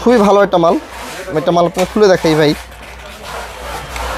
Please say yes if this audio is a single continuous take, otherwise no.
yes